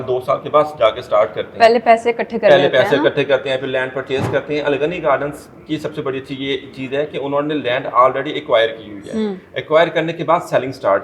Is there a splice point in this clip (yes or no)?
no